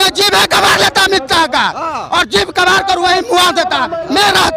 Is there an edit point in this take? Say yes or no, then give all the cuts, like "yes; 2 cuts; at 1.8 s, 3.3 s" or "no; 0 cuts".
no; 0 cuts